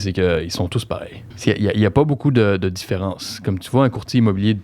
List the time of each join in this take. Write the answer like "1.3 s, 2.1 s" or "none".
1.4 s